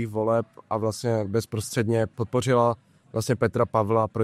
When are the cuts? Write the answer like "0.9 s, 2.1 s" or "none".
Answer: 2.1 s